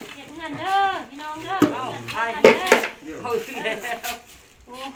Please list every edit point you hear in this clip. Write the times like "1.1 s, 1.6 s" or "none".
none

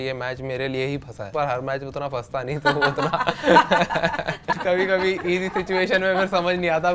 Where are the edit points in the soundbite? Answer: 1.3 s, 4.5 s

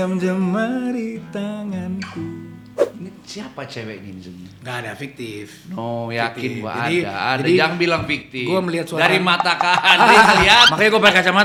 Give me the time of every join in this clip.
none

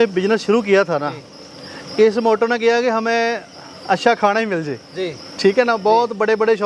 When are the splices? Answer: none

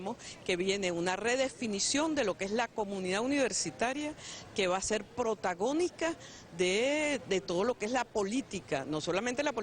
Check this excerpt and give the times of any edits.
5.1 s

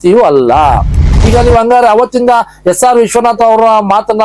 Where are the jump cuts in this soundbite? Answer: 1.1 s

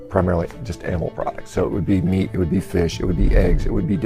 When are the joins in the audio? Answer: none

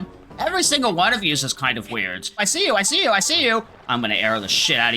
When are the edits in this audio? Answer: 2.4 s

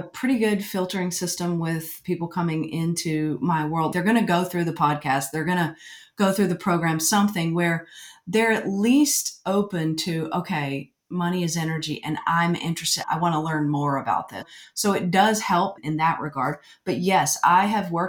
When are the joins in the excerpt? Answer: 3.9 s

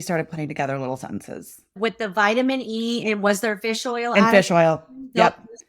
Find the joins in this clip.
1.6 s

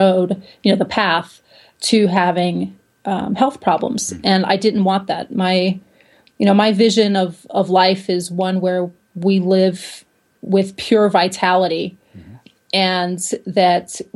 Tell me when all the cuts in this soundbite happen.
none

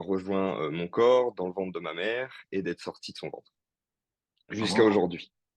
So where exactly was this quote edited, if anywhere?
none

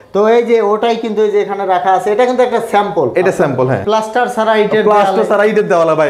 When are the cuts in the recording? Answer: 3.8 s

